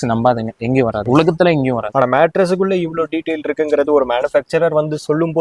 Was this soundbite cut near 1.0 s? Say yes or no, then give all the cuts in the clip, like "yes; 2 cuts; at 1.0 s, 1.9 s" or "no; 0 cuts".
yes; 2 cuts; at 1.0 s, 1.9 s